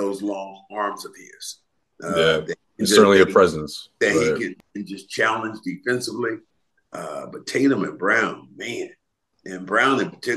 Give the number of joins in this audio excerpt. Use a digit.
1